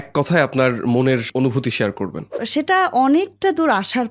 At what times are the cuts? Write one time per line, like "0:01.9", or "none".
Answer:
0:01.3
0:02.4